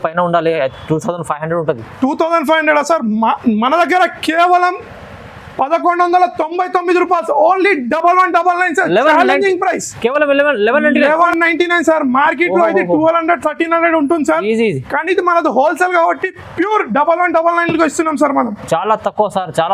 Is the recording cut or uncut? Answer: uncut